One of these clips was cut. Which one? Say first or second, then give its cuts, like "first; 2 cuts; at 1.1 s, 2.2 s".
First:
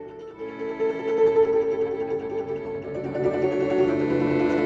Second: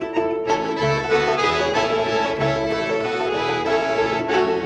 first; 1 cut; at 1.5 s